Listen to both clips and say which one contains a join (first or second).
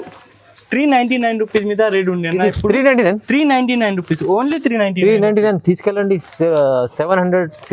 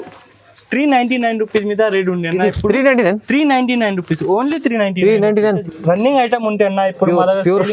second